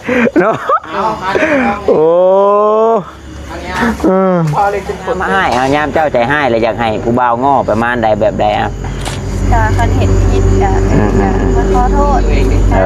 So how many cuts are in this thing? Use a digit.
2